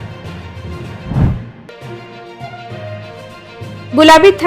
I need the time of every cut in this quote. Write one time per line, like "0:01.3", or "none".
0:01.0